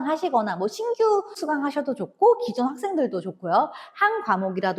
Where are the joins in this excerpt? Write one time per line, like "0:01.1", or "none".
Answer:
0:01.4